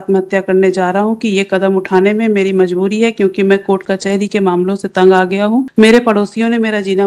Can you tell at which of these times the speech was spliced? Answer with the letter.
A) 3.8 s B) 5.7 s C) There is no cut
B